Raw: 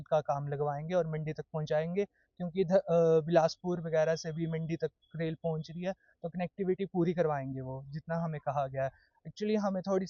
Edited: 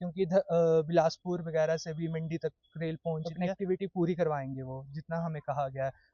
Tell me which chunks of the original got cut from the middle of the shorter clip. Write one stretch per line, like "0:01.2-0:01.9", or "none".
0:05.8-0:06.4